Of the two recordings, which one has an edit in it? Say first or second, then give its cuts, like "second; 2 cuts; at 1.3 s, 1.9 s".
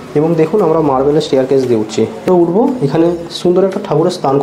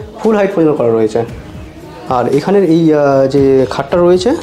first; 1 cut; at 2.2 s